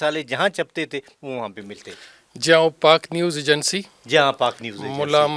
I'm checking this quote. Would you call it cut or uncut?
uncut